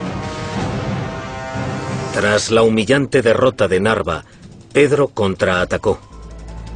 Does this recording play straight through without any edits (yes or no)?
no